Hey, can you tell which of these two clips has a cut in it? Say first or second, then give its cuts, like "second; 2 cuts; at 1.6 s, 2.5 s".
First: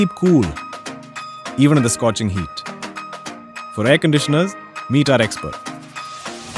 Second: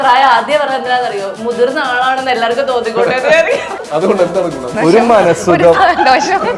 second; 2 cuts; at 3.7 s, 4.7 s